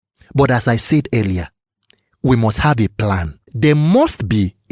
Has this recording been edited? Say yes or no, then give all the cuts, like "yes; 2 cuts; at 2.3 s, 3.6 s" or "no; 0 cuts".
yes; 1 cut; at 3.5 s